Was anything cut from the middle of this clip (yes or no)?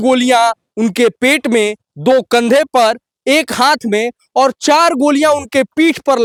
no